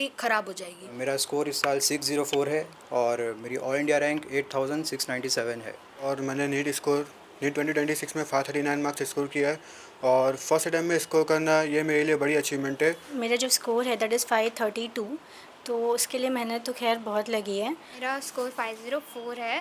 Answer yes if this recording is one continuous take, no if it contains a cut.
no